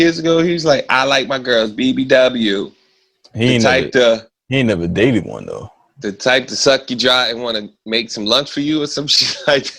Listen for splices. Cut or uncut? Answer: uncut